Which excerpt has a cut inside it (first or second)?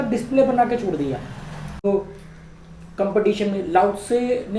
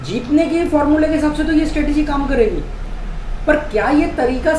first